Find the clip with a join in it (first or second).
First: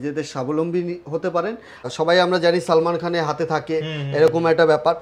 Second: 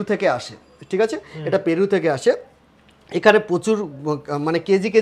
first